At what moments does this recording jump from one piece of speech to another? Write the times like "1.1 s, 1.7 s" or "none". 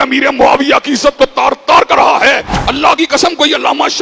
2.5 s